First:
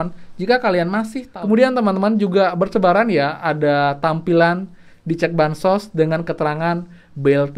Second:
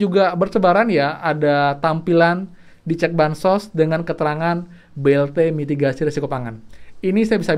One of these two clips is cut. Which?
first; 1 cut; at 1.2 s

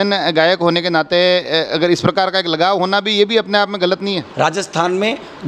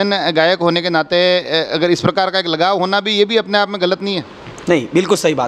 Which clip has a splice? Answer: first; 1 cut; at 4.2 s

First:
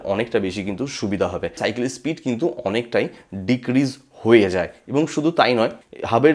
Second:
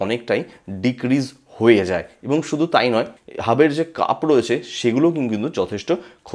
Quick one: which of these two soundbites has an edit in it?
first; 1 cut; at 1.6 s

